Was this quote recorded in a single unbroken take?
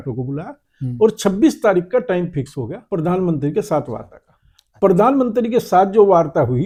yes; 0 cuts

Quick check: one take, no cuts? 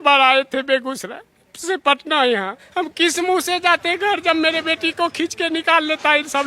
no; 1 cut; at 2.6 s

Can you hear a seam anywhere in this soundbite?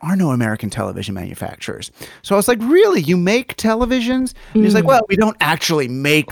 no; 0 cuts

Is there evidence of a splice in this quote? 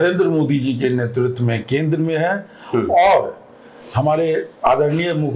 no; 0 cuts

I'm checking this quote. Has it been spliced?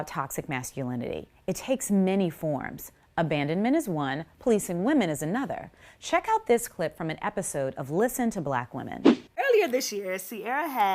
yes; 1 cut; at 9.3 s

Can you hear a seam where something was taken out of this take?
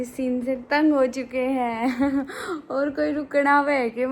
no; 0 cuts

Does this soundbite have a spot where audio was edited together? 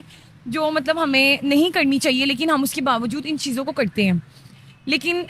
no; 0 cuts

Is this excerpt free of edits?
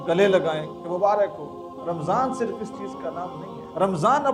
yes; 0 cuts

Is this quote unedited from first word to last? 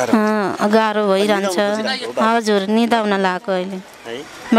yes; 0 cuts

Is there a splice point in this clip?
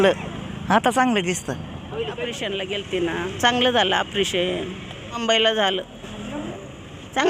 yes; 3 cuts; at 2.4 s, 5.2 s, 6.5 s

